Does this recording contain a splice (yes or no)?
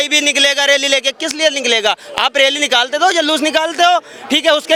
no